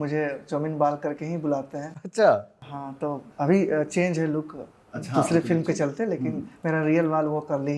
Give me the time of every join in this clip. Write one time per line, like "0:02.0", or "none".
none